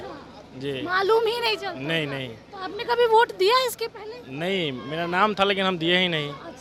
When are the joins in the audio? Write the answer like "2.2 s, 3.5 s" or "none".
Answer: none